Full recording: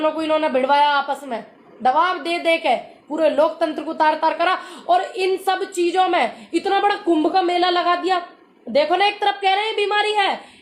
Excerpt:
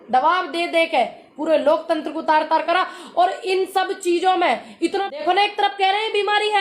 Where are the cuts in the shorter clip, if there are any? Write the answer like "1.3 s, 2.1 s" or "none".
5.0 s